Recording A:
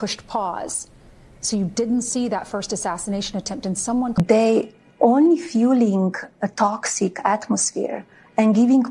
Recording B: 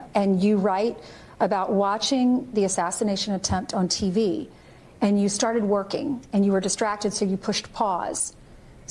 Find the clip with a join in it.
A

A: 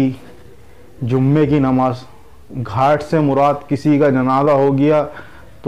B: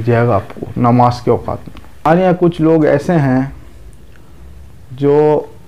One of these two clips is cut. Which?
B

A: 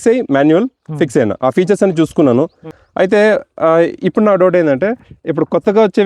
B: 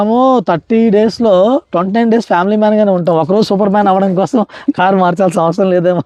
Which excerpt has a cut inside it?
A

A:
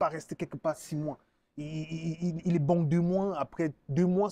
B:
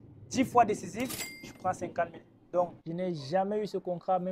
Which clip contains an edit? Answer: B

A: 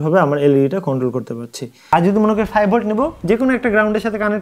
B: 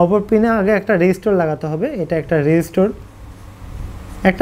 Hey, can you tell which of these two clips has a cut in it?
A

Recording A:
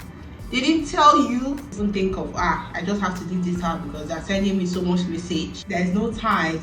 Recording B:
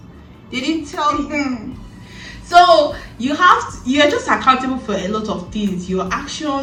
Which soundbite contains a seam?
A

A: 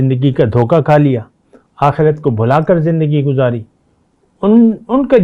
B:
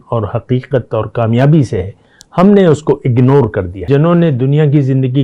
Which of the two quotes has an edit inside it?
B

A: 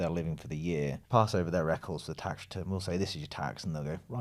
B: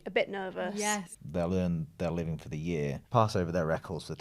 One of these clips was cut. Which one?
B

